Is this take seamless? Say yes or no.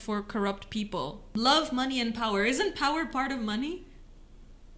no